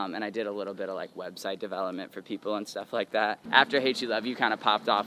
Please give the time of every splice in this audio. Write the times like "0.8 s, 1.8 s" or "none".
3.4 s